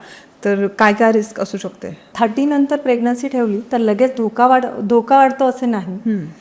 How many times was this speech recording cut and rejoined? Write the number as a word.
one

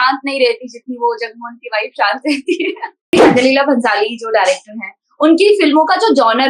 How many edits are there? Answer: one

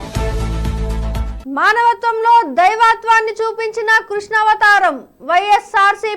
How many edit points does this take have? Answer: one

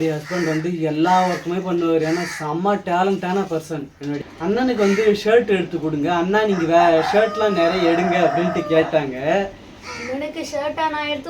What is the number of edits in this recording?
one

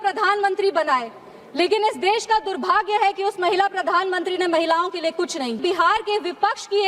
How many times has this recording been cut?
one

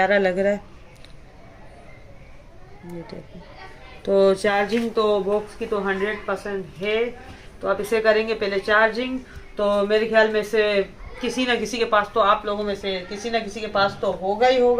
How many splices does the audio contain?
zero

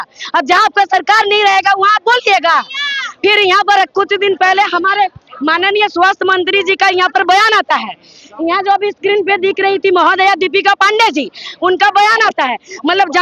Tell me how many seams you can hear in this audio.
zero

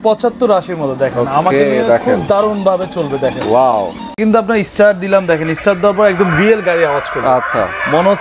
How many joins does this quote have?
one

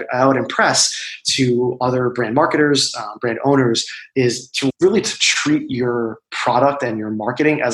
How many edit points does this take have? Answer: zero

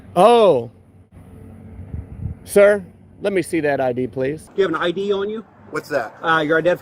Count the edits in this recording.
two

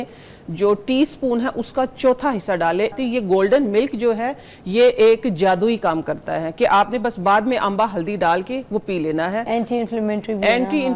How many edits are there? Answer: one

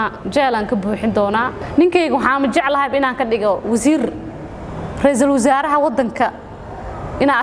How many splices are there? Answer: one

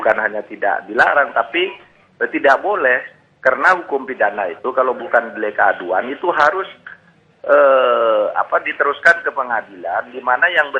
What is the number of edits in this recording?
one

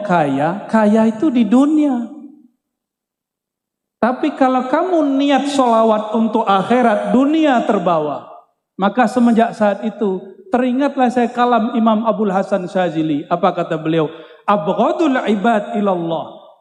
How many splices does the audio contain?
zero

